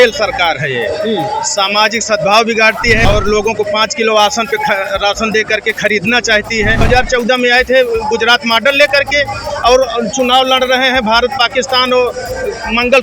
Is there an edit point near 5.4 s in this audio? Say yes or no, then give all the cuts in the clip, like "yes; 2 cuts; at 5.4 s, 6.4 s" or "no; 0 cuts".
no; 2 cuts; at 3.1 s, 6.8 s